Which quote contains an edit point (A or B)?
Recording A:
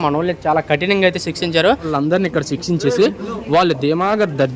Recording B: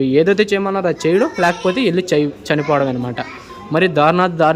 A